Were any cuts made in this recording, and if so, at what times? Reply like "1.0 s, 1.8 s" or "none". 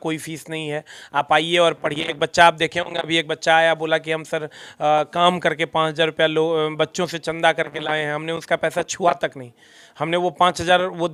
none